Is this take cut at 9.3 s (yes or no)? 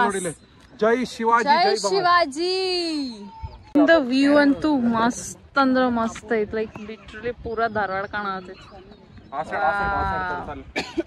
no